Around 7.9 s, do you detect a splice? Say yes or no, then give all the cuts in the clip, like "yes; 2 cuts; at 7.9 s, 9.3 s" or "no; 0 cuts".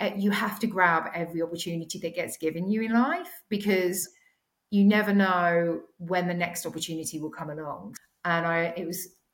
yes; 1 cut; at 7.9 s